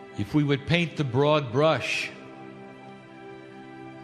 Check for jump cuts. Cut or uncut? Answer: uncut